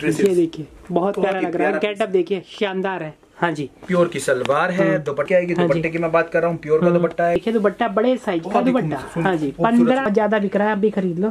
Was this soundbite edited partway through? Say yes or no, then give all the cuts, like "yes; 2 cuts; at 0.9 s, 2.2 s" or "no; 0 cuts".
yes; 3 cuts; at 5.3 s, 7.4 s, 10.1 s